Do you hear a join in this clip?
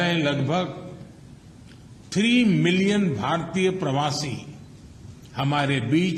no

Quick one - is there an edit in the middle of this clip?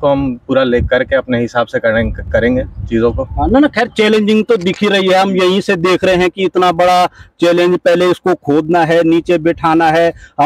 no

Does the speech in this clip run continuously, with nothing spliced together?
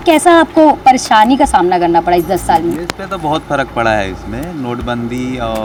yes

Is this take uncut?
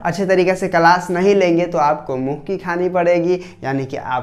yes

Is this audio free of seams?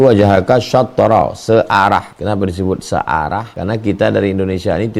no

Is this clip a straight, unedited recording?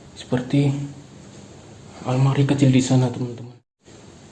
no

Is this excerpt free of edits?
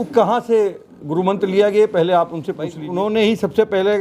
no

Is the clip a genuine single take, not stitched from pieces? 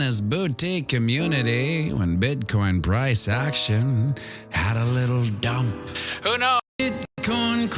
no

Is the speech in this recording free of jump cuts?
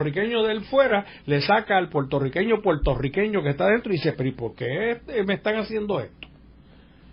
yes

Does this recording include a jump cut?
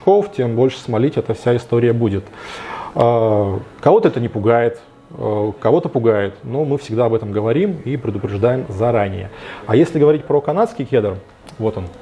no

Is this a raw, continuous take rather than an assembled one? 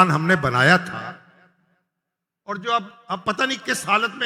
yes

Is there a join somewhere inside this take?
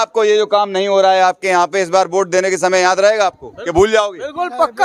no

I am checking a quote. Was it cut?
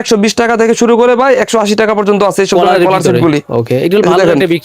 no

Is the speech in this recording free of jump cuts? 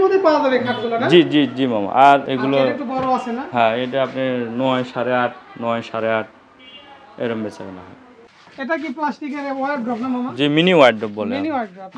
no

